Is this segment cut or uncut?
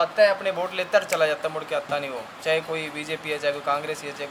uncut